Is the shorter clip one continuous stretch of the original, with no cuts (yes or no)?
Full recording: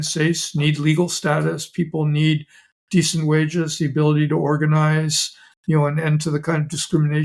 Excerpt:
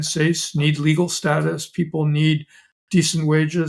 yes